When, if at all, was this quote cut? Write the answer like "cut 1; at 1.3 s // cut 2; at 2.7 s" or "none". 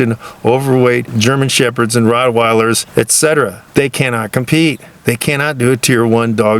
cut 1; at 1.1 s // cut 2; at 2.8 s // cut 3; at 3.6 s